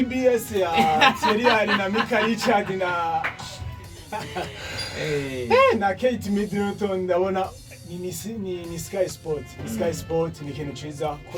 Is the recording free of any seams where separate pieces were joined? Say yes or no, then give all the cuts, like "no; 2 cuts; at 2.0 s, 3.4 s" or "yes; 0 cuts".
yes; 0 cuts